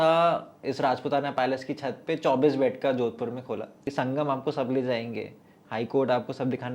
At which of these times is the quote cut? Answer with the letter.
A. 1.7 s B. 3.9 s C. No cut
B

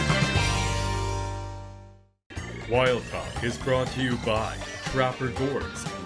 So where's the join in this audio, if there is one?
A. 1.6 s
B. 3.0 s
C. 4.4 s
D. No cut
A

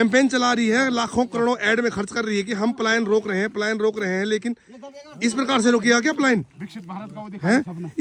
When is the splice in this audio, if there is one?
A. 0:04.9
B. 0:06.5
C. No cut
C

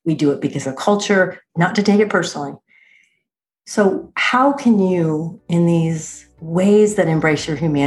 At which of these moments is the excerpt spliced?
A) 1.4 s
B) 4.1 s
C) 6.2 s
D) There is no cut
A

